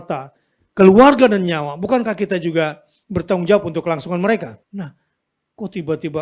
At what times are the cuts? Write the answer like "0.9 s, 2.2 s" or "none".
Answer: 4.6 s

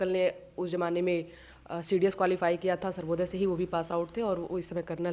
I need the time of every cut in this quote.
none

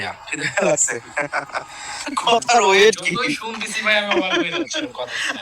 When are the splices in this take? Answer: 1.9 s

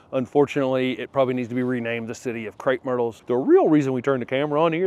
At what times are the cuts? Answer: 3.2 s

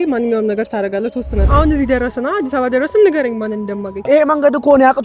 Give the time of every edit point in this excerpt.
1.4 s, 3.9 s

